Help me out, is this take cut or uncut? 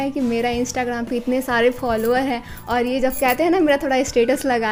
uncut